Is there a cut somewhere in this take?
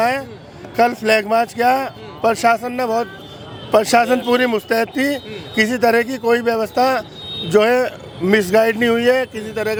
no; 0 cuts

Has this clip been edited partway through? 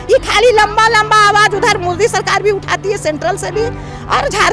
no; 0 cuts

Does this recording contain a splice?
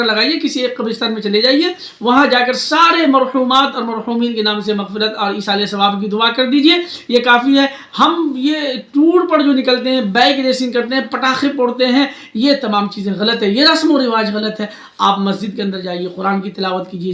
no; 0 cuts

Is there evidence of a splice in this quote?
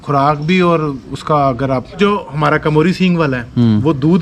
yes; 1 cut; at 2.0 s

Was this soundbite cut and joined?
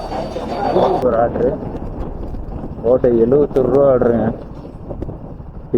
yes; 1 cut; at 1.0 s

